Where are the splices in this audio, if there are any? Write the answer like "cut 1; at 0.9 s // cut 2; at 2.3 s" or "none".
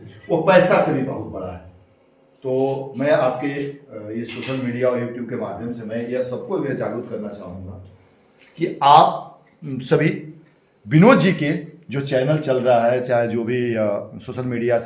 none